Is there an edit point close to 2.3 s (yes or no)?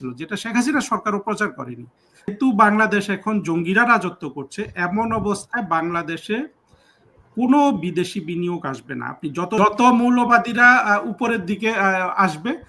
yes